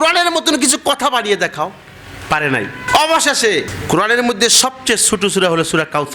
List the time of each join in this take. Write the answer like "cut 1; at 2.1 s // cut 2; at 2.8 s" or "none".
none